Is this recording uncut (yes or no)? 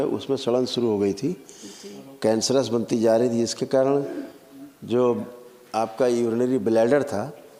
yes